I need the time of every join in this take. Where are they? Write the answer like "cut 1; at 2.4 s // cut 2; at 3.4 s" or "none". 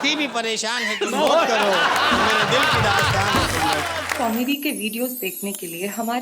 cut 1; at 4.1 s